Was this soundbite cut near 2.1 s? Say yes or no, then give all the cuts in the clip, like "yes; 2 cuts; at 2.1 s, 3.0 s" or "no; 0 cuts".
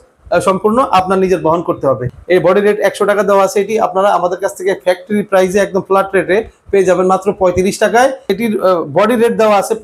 yes; 2 cuts; at 2.1 s, 8.3 s